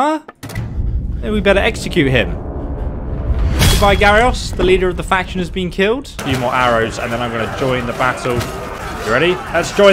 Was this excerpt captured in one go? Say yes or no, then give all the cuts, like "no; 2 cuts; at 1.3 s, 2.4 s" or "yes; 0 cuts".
no; 2 cuts; at 6.2 s, 8.8 s